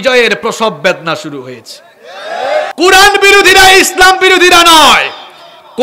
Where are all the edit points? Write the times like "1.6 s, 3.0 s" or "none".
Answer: 2.7 s

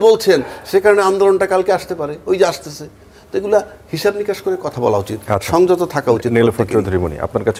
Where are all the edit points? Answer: none

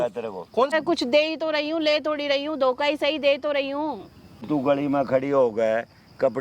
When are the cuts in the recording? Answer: 0.7 s, 4.5 s

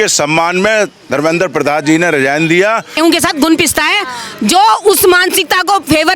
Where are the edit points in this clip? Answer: 3.0 s

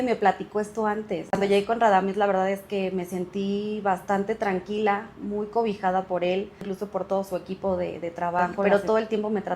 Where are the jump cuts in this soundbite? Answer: 1.4 s, 6.7 s, 8.6 s

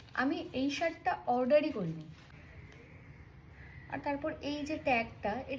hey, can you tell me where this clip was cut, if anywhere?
2.2 s

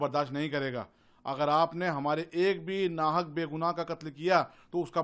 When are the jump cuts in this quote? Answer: none

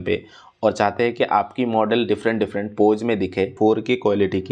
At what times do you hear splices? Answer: 3.5 s

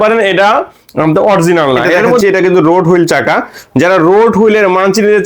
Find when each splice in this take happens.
2.2 s

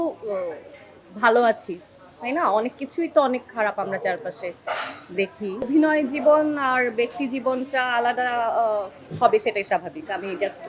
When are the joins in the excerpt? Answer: 5.6 s

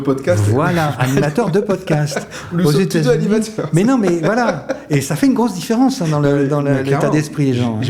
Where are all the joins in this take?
none

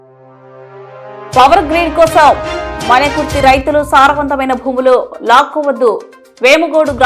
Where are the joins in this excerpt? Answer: none

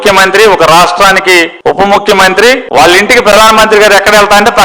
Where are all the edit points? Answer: none

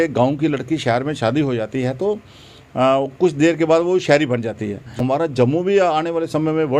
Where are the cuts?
4.9 s

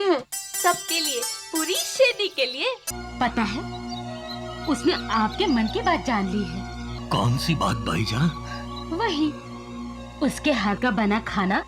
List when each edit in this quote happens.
3.0 s, 6.9 s

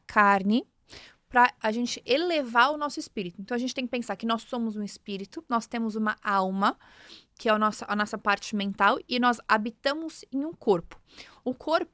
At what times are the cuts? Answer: none

